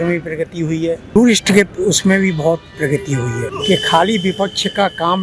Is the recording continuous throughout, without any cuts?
no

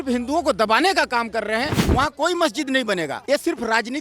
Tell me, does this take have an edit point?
yes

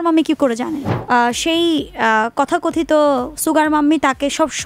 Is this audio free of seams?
no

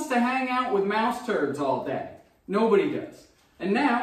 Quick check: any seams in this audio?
no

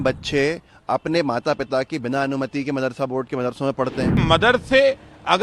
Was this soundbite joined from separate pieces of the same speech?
yes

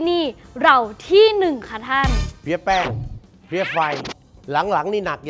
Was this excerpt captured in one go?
no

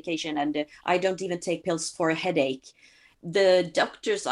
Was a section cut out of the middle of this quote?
yes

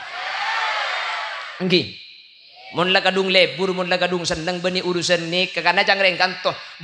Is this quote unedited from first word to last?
no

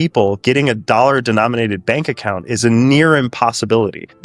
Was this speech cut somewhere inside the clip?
no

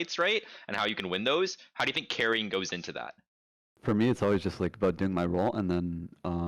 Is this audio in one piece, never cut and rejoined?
no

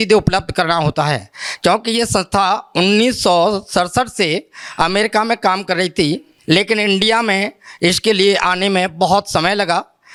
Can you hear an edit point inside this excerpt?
no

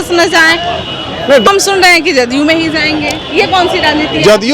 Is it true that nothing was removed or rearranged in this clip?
no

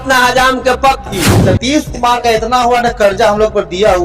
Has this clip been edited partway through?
yes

